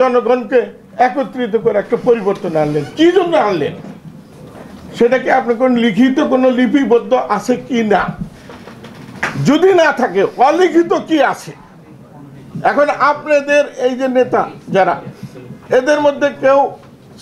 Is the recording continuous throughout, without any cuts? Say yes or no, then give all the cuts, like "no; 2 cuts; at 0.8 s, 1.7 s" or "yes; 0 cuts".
yes; 0 cuts